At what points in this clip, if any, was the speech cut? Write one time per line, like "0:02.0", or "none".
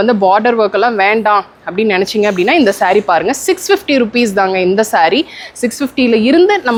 none